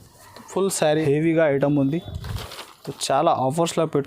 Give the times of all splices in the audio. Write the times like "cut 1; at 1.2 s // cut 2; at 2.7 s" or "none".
cut 1; at 1.0 s

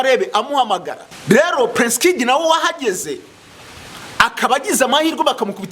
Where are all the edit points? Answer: cut 1; at 1.0 s

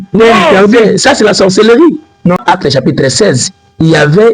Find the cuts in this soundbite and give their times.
cut 1; at 2.4 s

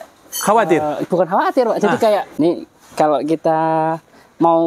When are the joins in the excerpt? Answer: cut 1; at 2.3 s

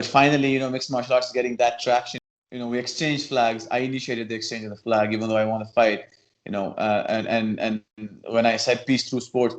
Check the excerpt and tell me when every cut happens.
cut 1; at 2.2 s

